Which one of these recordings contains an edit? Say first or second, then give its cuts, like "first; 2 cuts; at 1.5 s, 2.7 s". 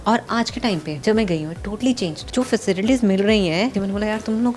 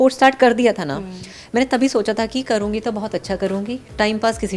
first; 3 cuts; at 0.9 s, 2.2 s, 3.7 s